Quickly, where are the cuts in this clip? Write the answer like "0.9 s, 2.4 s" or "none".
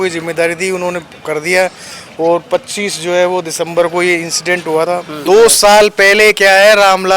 5.2 s

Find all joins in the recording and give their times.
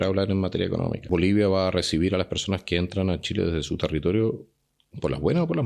1.0 s

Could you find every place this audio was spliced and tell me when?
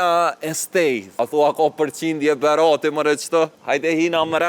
1.1 s, 3.6 s

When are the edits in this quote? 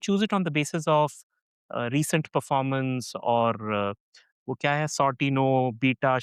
none

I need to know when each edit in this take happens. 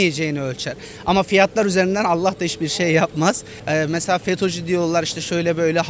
3.5 s

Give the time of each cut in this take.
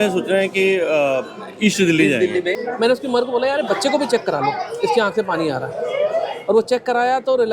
2.6 s

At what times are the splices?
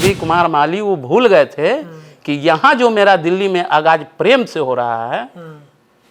none

